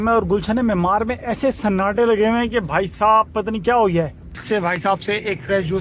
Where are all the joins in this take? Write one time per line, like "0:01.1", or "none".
0:04.3